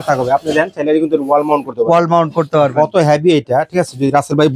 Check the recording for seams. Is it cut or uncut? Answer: uncut